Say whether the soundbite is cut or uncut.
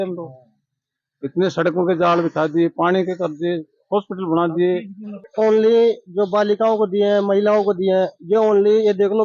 cut